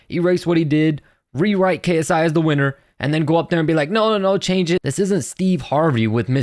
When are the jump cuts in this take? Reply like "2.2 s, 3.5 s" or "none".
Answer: none